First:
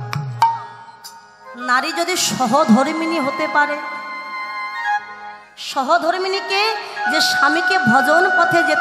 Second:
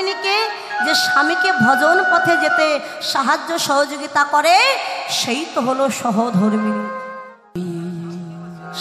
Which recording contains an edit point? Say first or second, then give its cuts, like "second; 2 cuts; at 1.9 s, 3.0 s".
second; 1 cut; at 7.5 s